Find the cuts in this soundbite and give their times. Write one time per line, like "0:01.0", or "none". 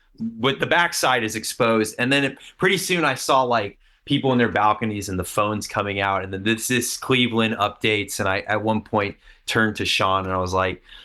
none